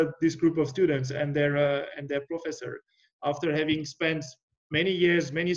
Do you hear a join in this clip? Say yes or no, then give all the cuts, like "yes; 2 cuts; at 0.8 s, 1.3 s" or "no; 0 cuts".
no; 0 cuts